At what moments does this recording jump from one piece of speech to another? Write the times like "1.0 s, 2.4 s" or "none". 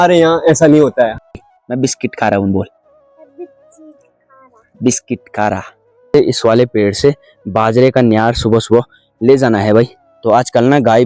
1.1 s, 6.1 s